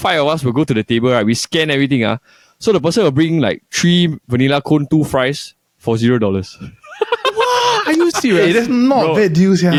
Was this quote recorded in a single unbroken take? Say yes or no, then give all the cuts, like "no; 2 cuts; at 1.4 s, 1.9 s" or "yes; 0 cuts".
yes; 0 cuts